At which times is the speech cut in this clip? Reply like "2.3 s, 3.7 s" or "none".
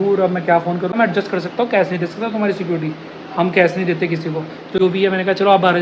0.9 s, 4.8 s